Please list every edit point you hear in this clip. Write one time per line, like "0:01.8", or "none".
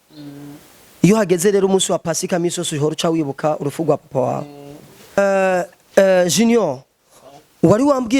none